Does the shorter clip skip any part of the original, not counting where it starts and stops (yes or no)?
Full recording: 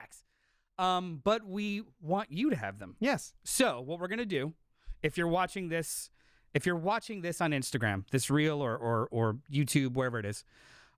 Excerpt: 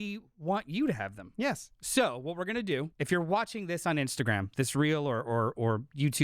yes